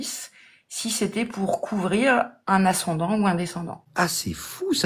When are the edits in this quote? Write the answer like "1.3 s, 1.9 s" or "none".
3.8 s